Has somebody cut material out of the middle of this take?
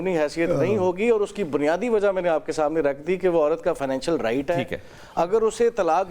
no; 0 cuts

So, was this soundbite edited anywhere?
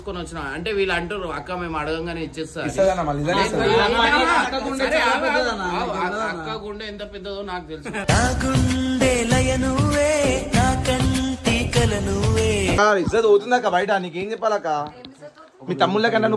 yes; 1 cut; at 12.8 s

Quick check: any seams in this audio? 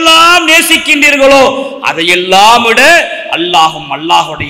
no; 0 cuts

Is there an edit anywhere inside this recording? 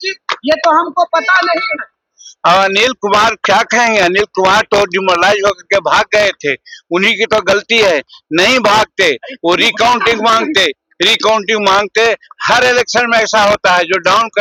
no; 0 cuts

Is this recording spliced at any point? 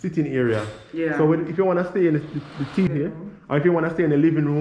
yes; 1 cut; at 2.9 s

